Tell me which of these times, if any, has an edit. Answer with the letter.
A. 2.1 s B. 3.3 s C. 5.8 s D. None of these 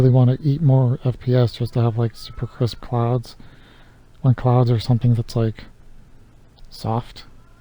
D